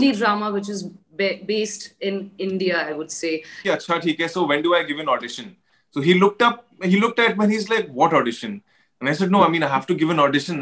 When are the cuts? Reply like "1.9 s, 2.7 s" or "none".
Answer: 3.6 s